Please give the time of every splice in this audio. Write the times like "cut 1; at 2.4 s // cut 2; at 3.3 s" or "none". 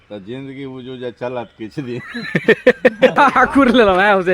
cut 1; at 3.2 s